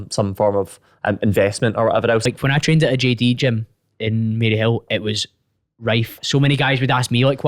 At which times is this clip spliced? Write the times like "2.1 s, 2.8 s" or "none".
2.2 s